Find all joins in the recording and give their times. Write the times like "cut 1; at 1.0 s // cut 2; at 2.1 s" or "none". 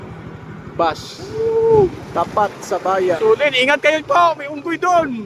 cut 1; at 1.1 s // cut 2; at 2.0 s // cut 3; at 3.2 s